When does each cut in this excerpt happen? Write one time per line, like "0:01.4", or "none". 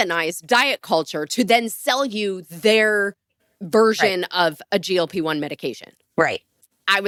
none